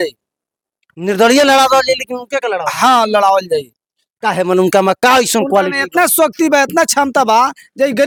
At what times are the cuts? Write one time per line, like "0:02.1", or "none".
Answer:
none

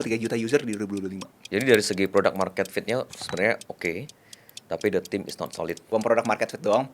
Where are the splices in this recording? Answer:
0:01.5
0:05.8

